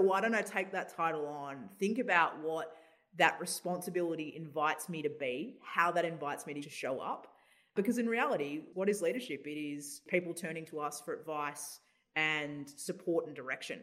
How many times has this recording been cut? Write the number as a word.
four